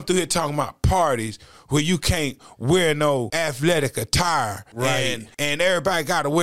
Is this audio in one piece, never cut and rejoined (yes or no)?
no